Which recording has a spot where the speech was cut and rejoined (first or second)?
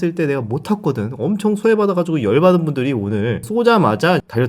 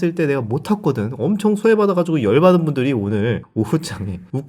first